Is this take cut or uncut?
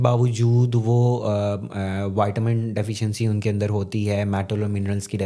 uncut